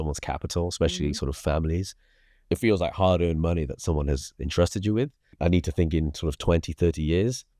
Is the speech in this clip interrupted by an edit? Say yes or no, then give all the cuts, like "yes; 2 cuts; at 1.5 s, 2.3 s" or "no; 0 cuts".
no; 0 cuts